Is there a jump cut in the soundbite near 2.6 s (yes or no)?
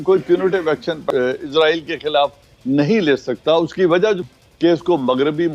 no